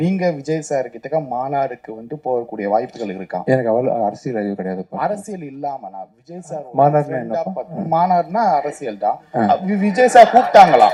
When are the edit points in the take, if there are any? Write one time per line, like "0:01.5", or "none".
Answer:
none